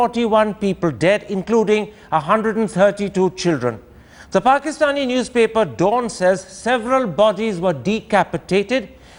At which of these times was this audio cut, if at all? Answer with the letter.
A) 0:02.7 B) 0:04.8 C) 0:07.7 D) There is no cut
D